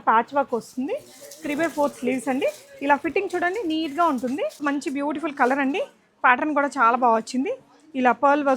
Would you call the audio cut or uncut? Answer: cut